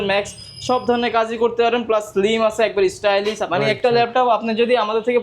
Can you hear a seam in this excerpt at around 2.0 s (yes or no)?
no